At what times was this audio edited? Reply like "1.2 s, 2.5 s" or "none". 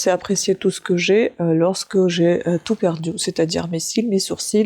none